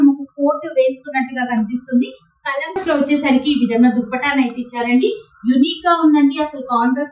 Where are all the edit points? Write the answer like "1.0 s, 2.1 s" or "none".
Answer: 2.8 s